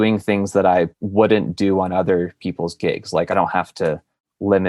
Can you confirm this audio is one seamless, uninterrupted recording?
no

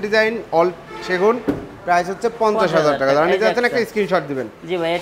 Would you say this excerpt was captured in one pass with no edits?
yes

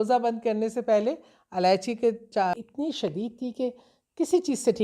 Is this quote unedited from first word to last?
no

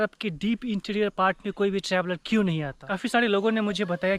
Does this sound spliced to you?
yes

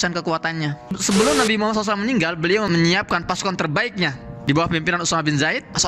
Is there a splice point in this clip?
yes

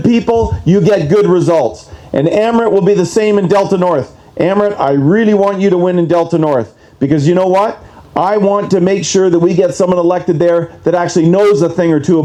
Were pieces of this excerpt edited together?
no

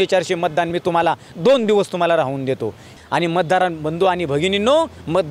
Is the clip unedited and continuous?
no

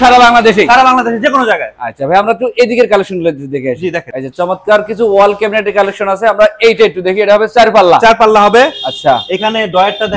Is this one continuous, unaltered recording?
yes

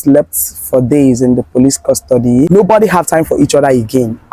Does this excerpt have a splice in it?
yes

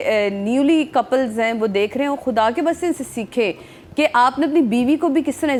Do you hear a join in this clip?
no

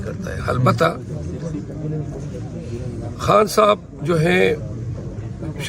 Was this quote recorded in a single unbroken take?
yes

